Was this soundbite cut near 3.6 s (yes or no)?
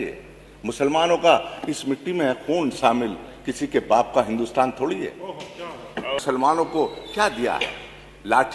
no